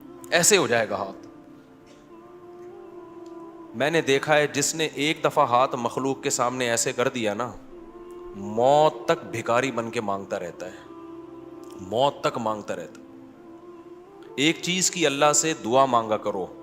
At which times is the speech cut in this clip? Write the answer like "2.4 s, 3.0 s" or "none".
1.2 s, 3.7 s